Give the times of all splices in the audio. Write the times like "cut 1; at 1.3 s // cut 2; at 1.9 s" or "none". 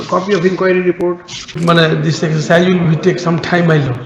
cut 1; at 1.6 s